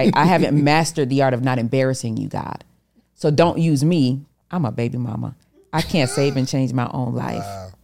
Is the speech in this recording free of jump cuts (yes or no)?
no